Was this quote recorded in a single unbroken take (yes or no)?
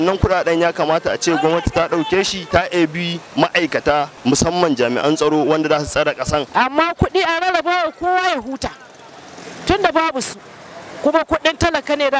no